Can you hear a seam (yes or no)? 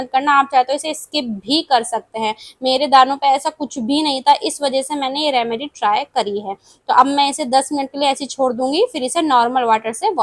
no